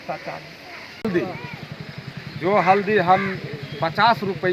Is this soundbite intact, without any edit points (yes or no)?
no